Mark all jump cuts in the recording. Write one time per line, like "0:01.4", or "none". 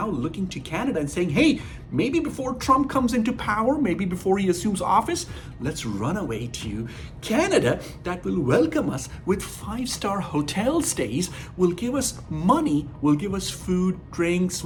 none